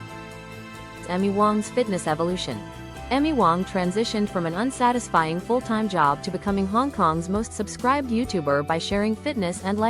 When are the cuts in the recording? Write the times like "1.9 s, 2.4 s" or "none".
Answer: 1.1 s